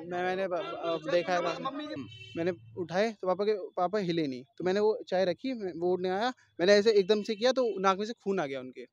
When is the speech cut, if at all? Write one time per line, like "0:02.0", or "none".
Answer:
0:01.9